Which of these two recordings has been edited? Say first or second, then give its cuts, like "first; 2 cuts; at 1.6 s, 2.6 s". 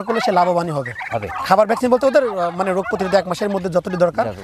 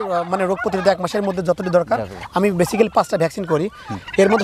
first; 1 cut; at 1.3 s